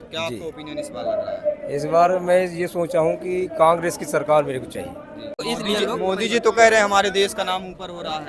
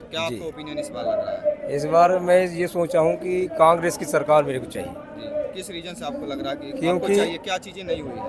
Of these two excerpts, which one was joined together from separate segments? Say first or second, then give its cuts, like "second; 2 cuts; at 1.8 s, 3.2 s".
first; 1 cut; at 5.4 s